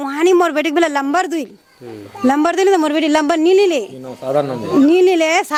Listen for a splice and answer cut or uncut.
uncut